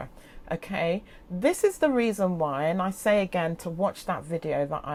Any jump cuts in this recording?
no; 0 cuts

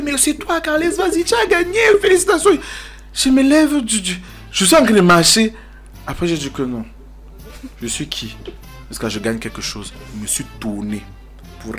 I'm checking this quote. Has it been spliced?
no; 0 cuts

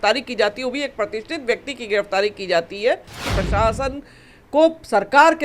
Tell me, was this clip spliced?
yes; 1 cut; at 3.3 s

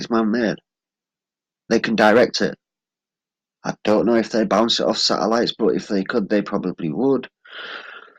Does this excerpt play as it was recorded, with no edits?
yes; 0 cuts

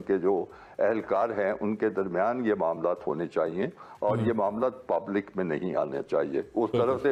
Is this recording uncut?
yes; 0 cuts

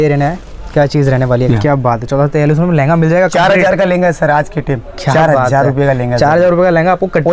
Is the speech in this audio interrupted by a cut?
yes; 1 cut; at 1.5 s

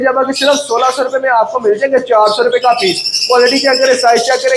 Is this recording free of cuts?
yes; 0 cuts

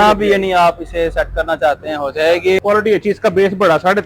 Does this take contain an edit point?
yes; 1 cut; at 2.6 s

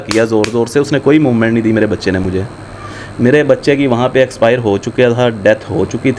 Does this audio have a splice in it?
no; 0 cuts

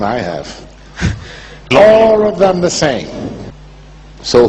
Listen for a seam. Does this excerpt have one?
yes; 1 cut; at 2.0 s

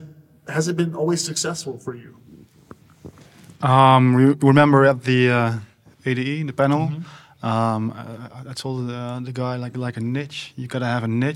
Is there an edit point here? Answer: no; 0 cuts

